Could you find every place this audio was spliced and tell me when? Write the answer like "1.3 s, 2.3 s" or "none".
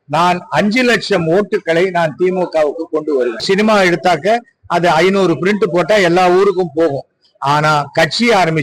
3.4 s